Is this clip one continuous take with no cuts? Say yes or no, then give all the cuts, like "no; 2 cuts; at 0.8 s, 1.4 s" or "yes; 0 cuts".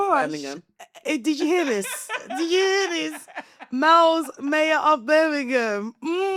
yes; 0 cuts